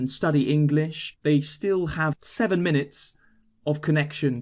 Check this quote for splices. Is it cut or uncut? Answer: cut